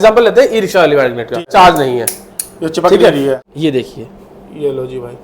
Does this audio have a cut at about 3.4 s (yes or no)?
yes